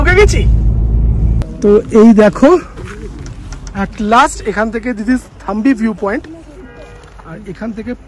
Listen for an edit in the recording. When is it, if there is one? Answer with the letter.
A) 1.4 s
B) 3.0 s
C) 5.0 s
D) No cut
A